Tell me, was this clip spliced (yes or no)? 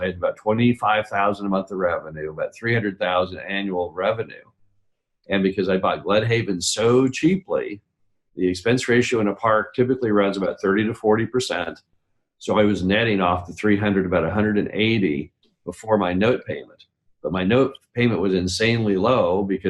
no